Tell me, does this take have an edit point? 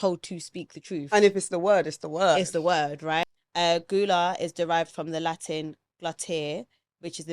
yes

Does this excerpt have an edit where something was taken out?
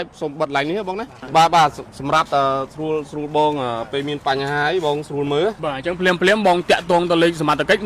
yes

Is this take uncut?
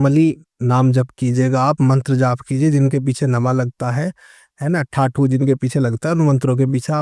yes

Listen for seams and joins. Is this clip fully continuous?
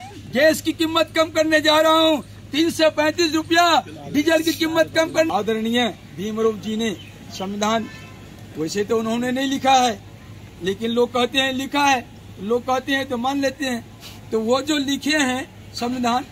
no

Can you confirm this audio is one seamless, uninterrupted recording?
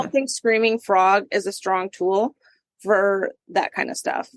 no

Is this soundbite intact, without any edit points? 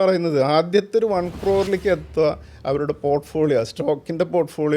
yes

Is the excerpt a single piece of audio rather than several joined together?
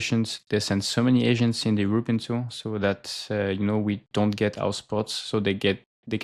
yes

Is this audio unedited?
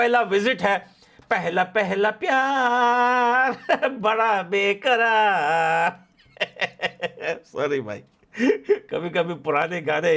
yes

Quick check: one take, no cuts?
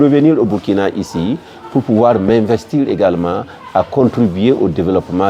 yes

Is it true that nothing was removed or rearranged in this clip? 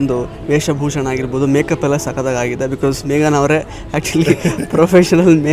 yes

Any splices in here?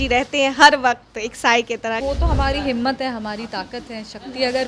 yes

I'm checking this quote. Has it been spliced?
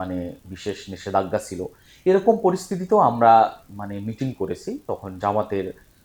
no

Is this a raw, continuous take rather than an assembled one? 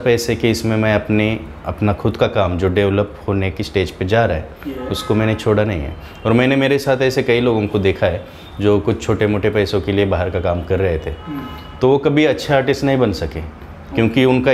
yes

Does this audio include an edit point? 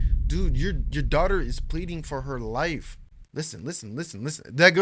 no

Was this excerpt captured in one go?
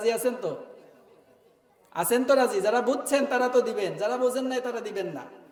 yes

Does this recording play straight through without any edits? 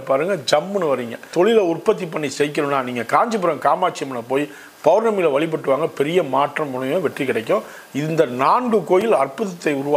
no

